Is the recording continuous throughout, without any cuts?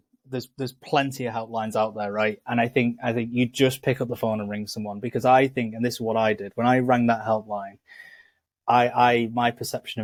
yes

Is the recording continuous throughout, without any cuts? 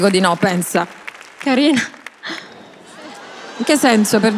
yes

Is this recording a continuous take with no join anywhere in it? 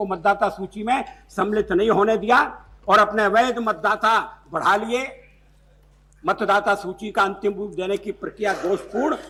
yes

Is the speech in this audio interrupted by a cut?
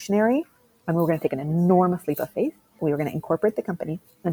yes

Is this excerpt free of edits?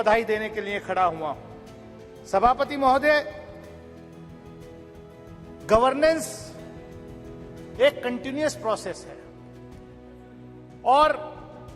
no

